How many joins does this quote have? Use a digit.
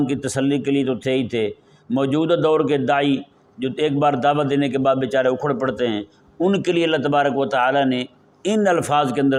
0